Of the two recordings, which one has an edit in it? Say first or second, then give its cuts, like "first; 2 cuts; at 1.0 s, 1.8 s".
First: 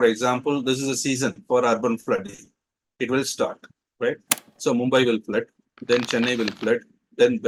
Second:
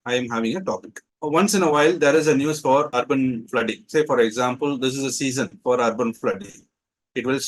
second; 1 cut; at 2.9 s